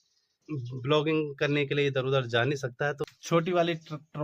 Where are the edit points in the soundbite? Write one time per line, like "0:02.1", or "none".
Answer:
0:03.1